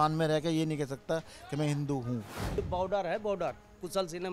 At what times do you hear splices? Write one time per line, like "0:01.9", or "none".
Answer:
0:02.4